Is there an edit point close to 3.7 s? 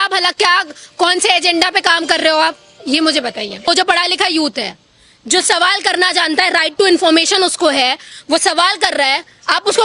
yes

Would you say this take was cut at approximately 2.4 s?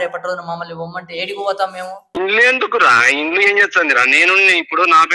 yes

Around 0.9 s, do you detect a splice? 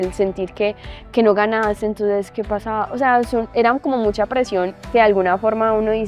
no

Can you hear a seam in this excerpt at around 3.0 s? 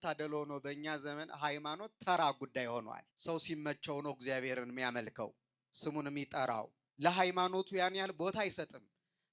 yes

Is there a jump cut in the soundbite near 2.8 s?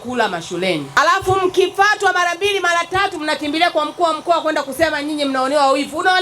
no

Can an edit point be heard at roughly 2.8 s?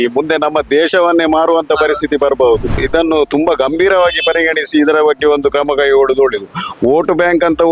yes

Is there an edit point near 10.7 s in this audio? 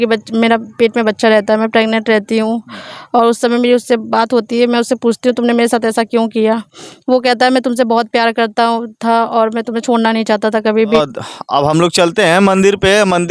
yes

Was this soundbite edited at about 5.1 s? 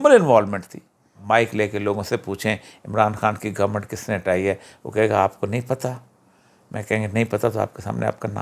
no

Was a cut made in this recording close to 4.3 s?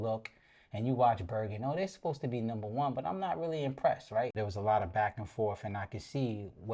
yes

